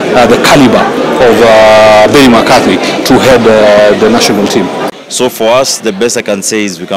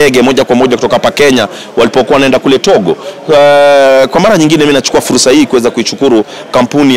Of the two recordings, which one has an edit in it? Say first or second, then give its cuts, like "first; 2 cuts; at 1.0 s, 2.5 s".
first; 1 cut; at 4.8 s